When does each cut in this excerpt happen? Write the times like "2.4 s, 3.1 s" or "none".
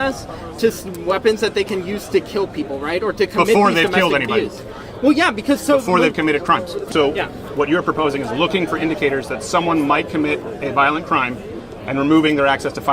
6.8 s